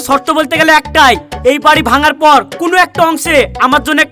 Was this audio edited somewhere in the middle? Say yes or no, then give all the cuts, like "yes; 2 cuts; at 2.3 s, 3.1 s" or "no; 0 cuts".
no; 0 cuts